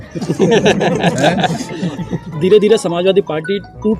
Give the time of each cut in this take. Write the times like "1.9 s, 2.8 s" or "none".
2.3 s